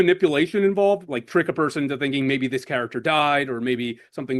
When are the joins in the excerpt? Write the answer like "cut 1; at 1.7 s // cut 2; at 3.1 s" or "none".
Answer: cut 1; at 1.0 s